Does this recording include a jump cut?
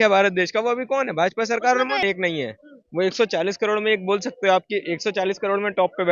yes; 1 cut; at 2.0 s

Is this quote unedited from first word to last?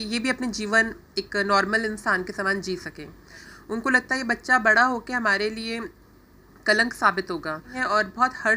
no; 2 cuts; at 3.4 s, 7.7 s

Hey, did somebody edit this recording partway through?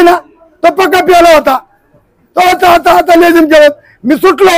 no; 0 cuts

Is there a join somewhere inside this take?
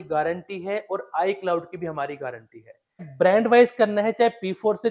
yes; 1 cut; at 3.1 s

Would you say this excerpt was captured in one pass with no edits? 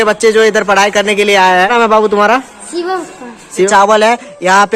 no; 2 cuts; at 1.7 s, 3.7 s

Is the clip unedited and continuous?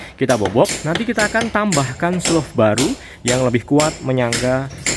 yes; 0 cuts

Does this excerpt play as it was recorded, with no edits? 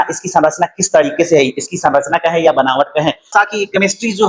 no; 1 cut; at 3.3 s

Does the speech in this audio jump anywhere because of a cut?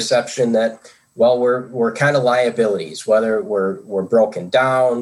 no; 0 cuts

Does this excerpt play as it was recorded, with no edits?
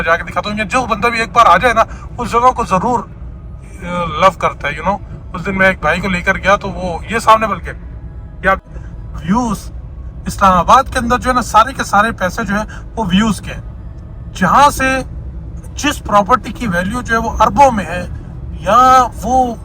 no; 1 cut; at 8.6 s

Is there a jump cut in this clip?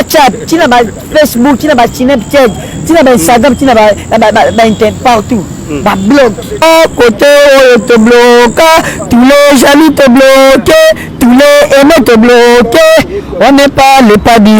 yes; 1 cut; at 6.6 s

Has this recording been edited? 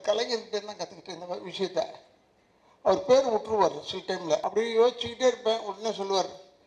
yes; 1 cut; at 4.5 s

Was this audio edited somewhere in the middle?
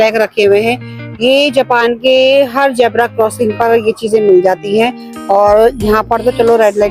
no; 0 cuts

